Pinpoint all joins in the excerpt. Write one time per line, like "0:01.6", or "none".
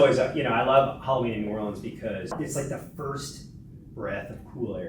0:02.3